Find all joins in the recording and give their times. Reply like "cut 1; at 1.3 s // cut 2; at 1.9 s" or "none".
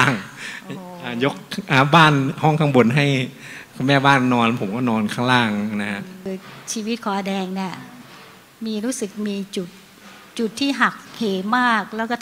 cut 1; at 6.3 s

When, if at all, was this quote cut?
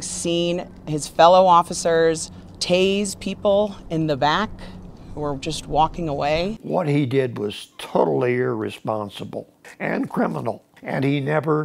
cut 1; at 6.6 s // cut 2; at 9.6 s // cut 3; at 10.7 s

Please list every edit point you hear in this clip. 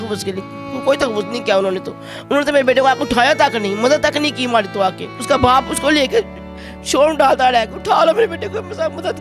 cut 1; at 5.1 s

